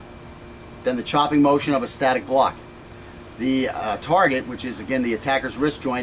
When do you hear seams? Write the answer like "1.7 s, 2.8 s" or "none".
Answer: 4.0 s